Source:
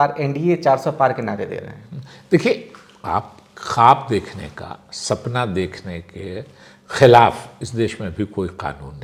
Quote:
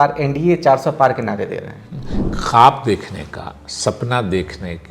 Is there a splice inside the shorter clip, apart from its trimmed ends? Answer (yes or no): yes